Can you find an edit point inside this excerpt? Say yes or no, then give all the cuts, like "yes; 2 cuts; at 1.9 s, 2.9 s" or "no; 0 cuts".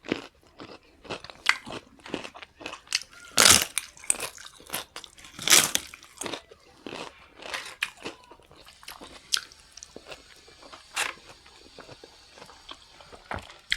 yes; 1 cut; at 8.6 s